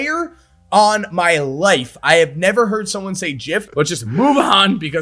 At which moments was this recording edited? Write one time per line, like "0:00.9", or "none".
0:03.7